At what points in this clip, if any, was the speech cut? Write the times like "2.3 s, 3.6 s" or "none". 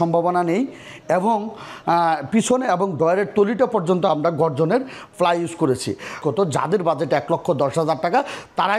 6.2 s